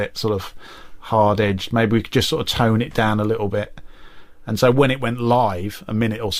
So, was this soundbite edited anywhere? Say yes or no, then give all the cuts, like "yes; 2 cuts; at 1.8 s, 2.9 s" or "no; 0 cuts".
no; 0 cuts